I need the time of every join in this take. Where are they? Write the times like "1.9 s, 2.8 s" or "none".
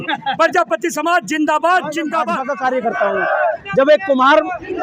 2.4 s